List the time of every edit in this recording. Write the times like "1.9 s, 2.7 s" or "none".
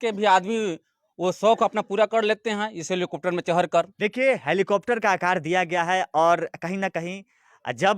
3.9 s

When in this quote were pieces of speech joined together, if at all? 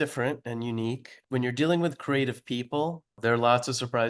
1.1 s, 3.2 s

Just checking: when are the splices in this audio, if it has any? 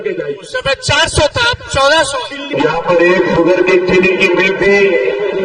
2.4 s

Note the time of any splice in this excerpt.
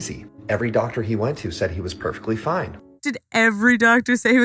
2.8 s

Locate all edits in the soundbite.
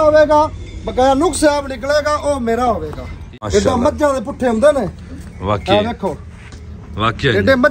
3.4 s

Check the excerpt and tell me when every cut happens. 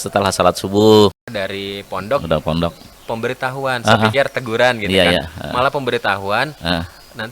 1.2 s

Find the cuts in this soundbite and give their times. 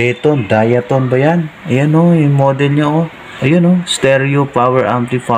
3.2 s

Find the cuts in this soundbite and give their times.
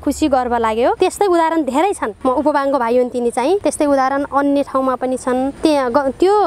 none

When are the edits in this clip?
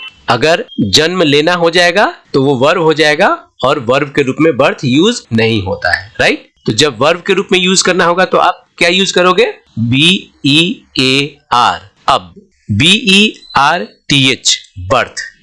6.5 s, 11.9 s

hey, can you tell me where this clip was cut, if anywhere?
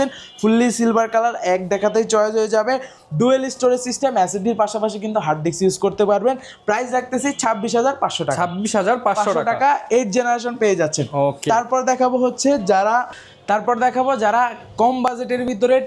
none

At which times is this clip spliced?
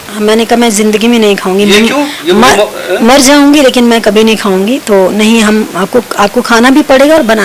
none

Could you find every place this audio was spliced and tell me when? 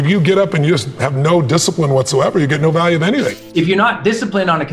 3.3 s

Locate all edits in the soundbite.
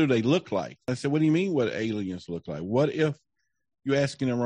0.9 s

